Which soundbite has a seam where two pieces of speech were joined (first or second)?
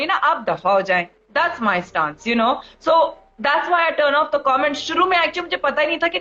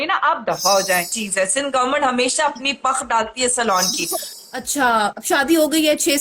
second